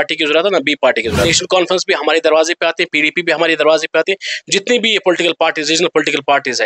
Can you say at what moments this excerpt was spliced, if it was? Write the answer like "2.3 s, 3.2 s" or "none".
1.3 s